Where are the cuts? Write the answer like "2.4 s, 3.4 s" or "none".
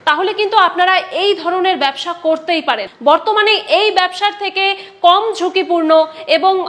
2.9 s